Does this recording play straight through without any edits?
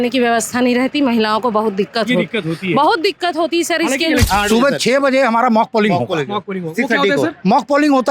no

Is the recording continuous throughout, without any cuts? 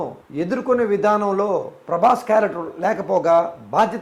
yes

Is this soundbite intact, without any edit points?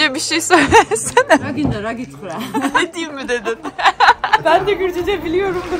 no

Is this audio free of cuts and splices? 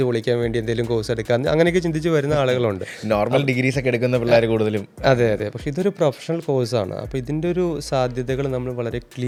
yes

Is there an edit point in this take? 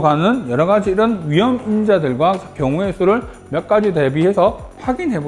no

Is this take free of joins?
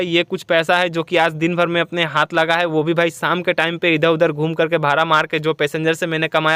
yes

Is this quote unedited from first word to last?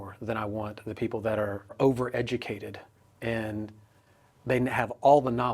no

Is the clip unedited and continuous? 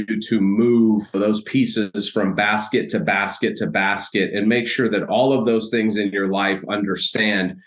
no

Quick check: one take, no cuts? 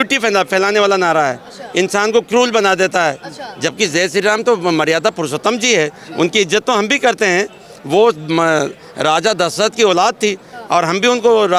yes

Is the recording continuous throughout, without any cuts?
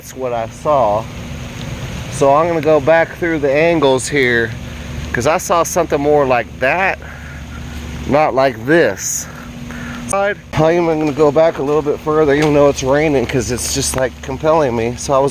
no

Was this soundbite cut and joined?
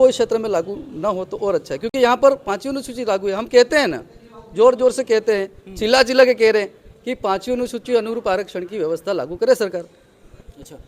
no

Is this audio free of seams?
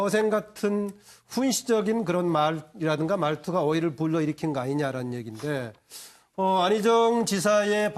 no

